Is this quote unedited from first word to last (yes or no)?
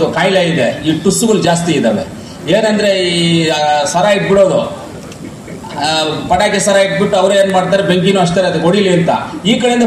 yes